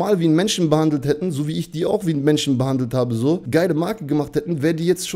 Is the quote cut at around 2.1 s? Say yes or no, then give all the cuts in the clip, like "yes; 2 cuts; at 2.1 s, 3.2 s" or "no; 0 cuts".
no; 1 cut; at 3.4 s